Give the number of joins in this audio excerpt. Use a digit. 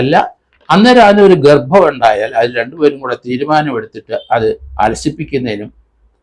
0